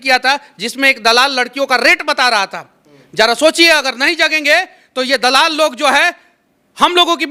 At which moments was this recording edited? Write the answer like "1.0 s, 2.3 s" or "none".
none